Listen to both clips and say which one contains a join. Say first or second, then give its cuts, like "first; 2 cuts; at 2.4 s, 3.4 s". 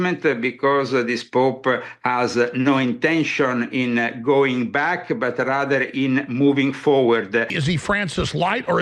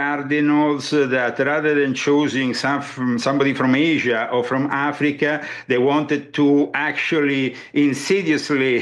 first; 1 cut; at 7.5 s